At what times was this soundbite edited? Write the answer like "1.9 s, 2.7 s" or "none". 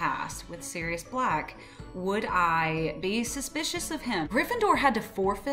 4.3 s